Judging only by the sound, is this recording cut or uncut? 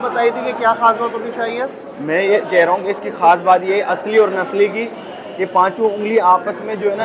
uncut